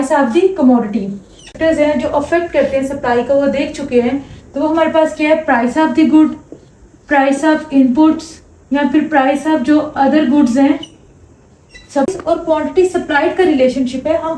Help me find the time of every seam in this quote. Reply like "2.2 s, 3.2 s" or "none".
1.6 s, 12.1 s